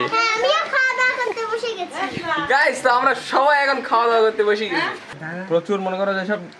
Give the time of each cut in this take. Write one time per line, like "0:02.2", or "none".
0:05.2